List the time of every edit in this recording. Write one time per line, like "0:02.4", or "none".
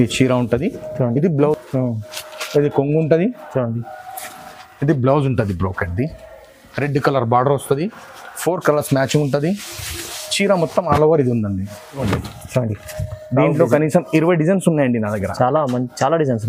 0:01.6
0:12.0